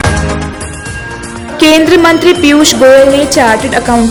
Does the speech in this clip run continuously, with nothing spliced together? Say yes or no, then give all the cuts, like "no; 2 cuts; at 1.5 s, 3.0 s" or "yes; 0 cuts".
yes; 0 cuts